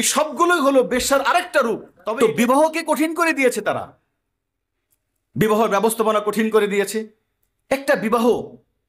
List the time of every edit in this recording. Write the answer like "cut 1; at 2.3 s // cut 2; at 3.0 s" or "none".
cut 1; at 1.9 s